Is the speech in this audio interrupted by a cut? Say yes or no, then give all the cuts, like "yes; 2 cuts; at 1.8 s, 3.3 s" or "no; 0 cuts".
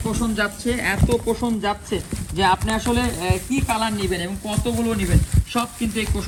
no; 0 cuts